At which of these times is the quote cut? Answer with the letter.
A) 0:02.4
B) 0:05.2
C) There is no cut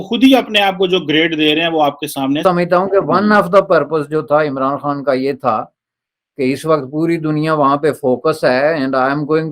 A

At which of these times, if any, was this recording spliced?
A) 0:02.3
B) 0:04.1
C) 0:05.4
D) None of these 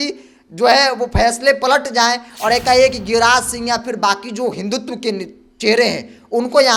D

